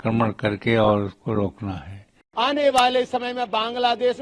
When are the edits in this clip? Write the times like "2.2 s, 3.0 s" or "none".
2.2 s